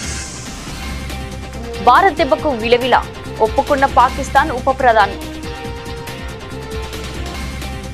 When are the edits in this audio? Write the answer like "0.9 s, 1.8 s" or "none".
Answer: 1.3 s, 5.1 s